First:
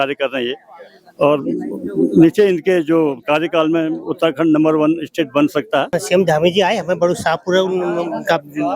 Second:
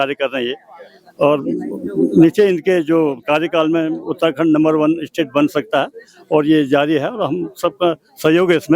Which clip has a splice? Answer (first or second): first